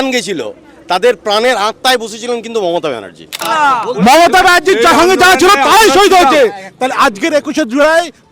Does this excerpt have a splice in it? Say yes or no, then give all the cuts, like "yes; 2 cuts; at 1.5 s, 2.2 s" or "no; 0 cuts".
yes; 1 cut; at 3.5 s